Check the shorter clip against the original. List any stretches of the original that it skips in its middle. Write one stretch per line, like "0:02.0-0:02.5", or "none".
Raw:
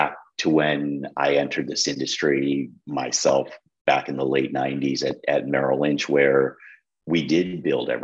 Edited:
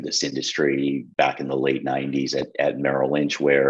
0:02.7-0:03.7